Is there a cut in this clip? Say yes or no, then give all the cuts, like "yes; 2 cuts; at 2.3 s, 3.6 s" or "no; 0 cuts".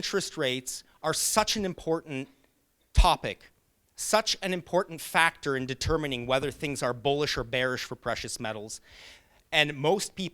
no; 0 cuts